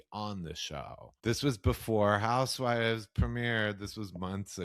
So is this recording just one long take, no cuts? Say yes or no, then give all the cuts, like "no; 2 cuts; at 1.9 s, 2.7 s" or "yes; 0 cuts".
no; 1 cut; at 1.0 s